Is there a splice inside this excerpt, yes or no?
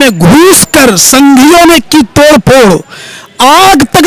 no